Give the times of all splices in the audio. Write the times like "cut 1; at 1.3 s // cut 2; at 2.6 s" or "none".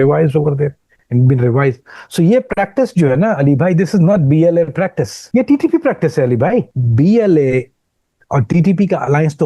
cut 1; at 5.1 s // cut 2; at 6.8 s